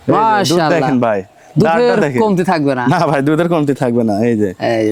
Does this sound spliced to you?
no; 0 cuts

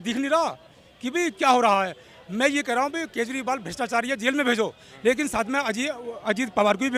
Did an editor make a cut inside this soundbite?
no; 0 cuts

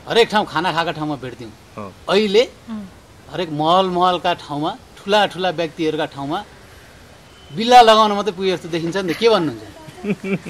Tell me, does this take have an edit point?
no; 0 cuts

